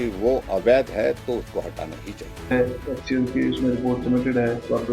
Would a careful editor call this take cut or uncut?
cut